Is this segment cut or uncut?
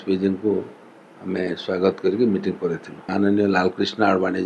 cut